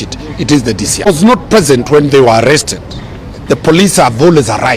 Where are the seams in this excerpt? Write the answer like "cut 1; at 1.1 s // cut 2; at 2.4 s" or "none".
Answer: cut 1; at 1.1 s

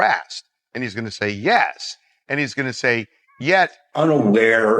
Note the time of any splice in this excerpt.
cut 1; at 3.8 s

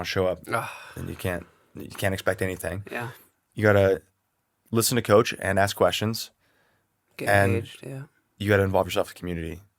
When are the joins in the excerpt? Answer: none

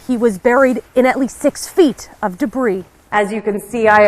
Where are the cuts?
cut 1; at 3.0 s

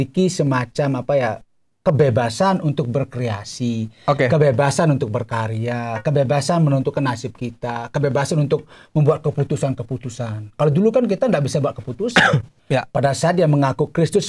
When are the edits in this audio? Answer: cut 1; at 12.5 s

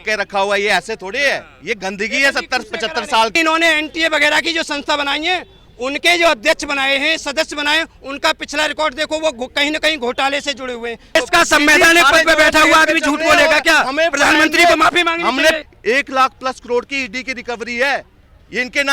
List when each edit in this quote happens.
cut 1; at 3.3 s // cut 2; at 11.2 s // cut 3; at 15.6 s

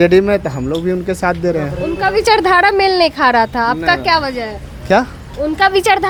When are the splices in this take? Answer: none

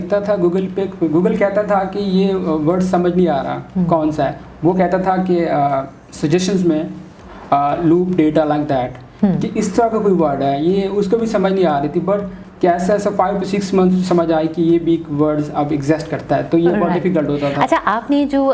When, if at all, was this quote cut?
none

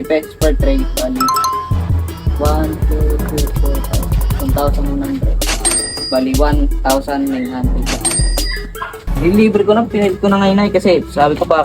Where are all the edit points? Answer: cut 1; at 9.0 s

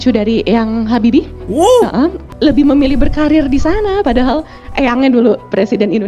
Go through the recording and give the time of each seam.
cut 1; at 2.2 s

